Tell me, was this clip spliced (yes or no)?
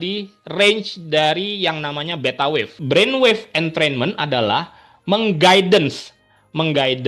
yes